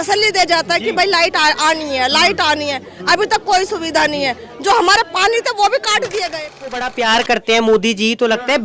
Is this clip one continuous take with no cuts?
no; 1 cut; at 6.7 s

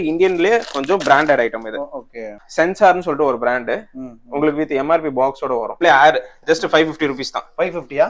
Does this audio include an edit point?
yes; 2 cuts; at 2.4 s, 5.8 s

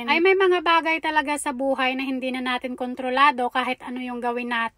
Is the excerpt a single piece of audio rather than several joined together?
yes; 0 cuts

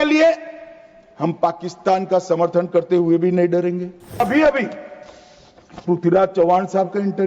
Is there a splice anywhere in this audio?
yes; 1 cut; at 4.2 s

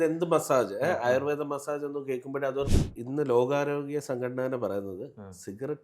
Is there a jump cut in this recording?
yes; 1 cut; at 2.7 s

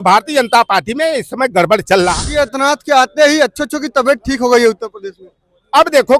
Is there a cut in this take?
yes; 1 cut; at 2.2 s

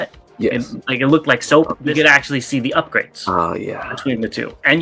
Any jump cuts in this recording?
yes; 1 cut; at 1.8 s

